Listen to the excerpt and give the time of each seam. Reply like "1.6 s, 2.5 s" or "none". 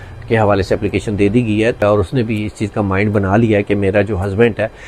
1.8 s